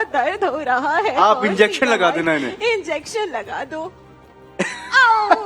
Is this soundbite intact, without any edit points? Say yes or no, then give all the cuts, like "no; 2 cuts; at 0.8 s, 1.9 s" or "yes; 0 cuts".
yes; 0 cuts